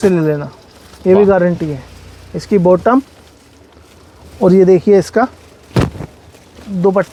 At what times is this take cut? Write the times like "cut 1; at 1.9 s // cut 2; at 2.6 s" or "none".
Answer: none